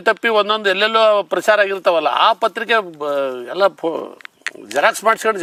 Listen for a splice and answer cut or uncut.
uncut